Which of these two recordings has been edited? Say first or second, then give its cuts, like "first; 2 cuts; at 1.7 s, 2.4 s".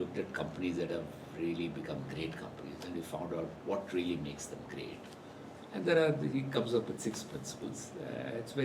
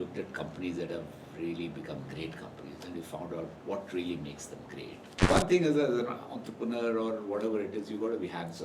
second; 1 cut; at 5.3 s